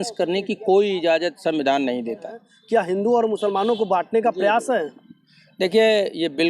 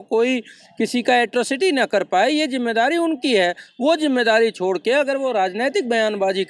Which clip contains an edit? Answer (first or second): first